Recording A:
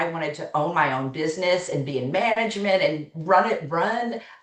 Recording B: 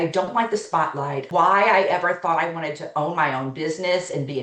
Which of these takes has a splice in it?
B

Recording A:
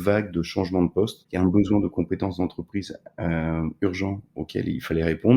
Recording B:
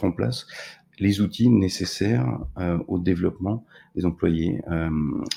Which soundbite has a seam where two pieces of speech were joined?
A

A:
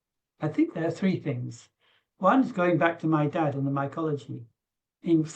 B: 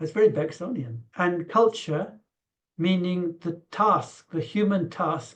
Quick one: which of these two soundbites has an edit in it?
B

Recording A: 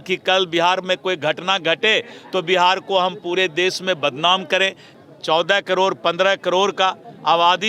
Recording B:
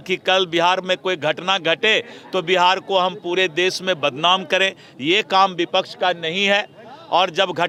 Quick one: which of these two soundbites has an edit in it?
A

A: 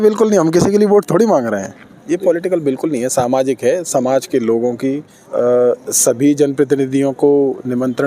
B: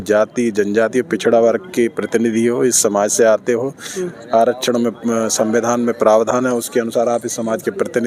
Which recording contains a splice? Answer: A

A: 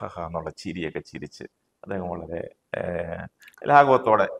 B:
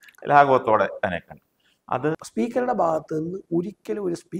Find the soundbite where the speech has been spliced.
B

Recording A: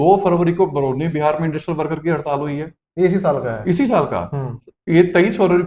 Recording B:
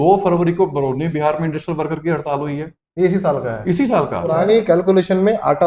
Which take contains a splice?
B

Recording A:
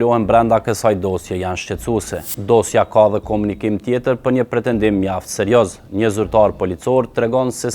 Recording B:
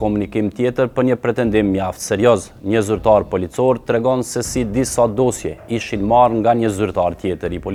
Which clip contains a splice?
A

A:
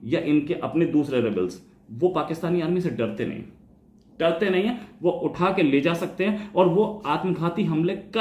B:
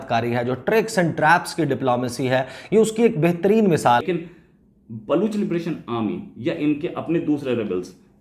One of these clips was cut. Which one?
B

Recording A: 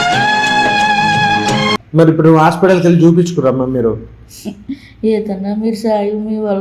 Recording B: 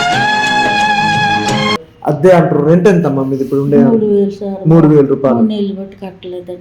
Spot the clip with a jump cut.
B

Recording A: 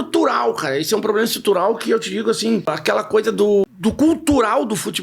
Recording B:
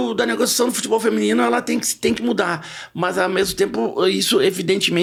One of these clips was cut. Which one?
A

